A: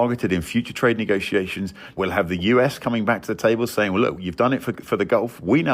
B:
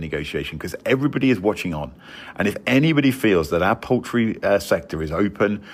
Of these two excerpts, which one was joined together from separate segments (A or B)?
A